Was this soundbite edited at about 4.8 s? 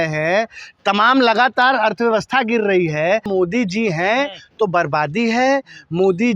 no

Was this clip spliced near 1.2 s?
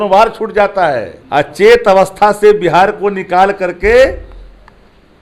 yes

